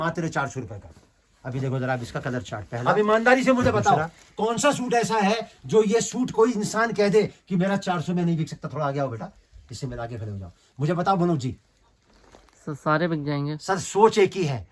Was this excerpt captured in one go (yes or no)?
no